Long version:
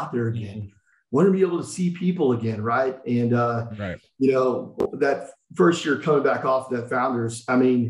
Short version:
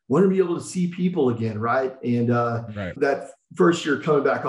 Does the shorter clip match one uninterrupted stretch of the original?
no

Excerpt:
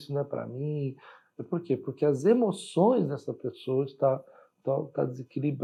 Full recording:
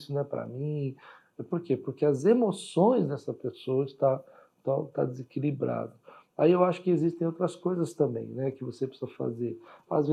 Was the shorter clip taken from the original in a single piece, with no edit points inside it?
yes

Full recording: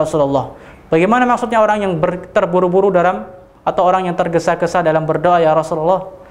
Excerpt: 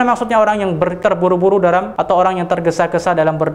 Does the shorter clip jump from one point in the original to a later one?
yes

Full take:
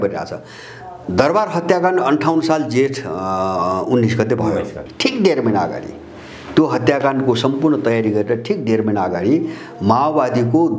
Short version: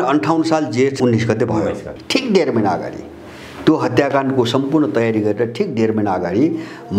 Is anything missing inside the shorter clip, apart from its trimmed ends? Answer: yes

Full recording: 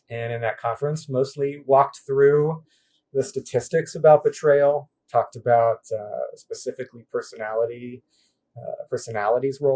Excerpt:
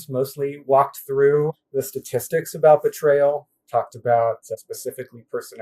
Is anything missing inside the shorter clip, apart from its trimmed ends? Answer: yes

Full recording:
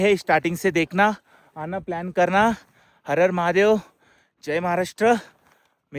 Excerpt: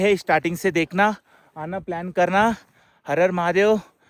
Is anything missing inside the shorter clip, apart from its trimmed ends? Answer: no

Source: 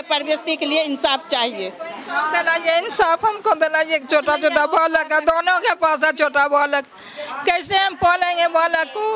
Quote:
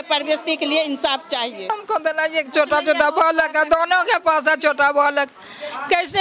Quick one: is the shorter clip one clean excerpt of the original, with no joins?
no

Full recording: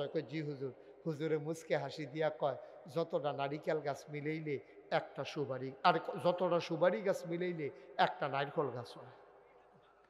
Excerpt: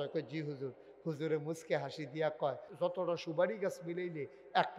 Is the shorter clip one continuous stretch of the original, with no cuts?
no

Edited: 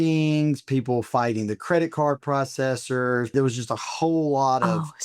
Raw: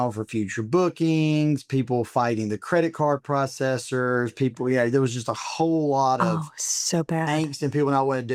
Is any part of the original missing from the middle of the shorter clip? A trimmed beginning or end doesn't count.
yes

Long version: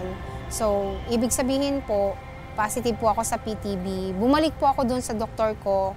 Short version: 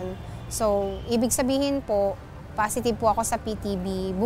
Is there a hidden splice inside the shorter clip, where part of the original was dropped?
no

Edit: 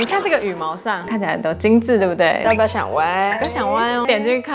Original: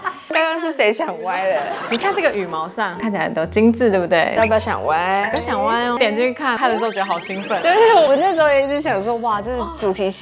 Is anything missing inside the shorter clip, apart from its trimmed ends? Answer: no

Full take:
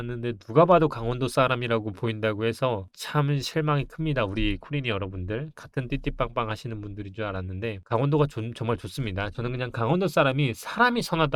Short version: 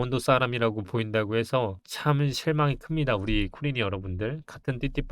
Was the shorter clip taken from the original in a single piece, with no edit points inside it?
yes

